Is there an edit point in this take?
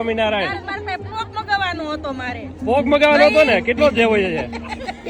no; 0 cuts

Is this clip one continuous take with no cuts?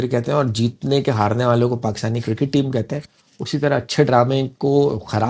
yes; 0 cuts

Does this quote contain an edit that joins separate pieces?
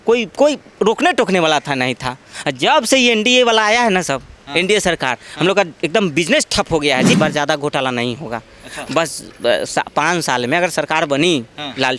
yes; 1 cut; at 7.2 s

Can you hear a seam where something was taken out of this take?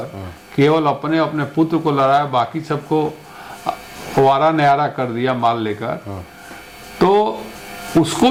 no; 0 cuts

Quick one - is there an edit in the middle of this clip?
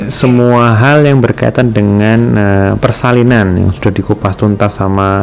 no; 0 cuts

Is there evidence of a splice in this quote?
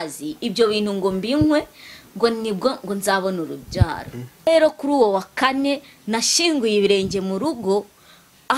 yes; 1 cut; at 4.5 s

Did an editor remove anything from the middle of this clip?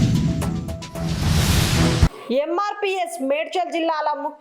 yes; 1 cut; at 2.0 s

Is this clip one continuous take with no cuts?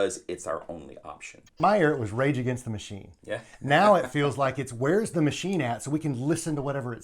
no; 1 cut; at 1.6 s

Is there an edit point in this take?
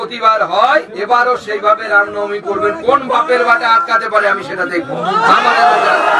no; 0 cuts

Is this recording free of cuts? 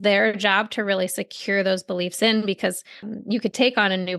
no; 1 cut; at 3.1 s

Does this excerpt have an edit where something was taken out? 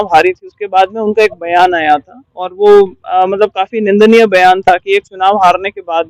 no; 0 cuts

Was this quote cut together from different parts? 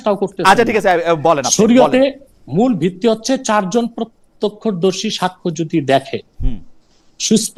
no; 0 cuts

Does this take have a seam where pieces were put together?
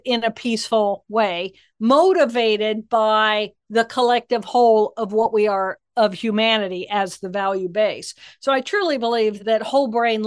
no; 0 cuts

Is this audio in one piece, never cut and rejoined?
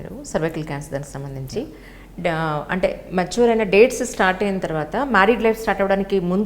yes; 0 cuts

